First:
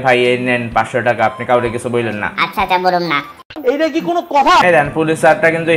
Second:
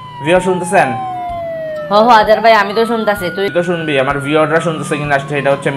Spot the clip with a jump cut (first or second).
first